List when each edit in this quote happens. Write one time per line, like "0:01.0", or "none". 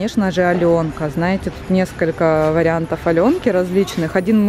none